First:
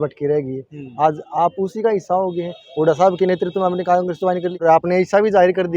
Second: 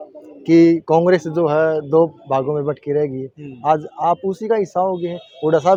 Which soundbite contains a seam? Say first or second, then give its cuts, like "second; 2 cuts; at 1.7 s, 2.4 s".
first; 1 cut; at 4.6 s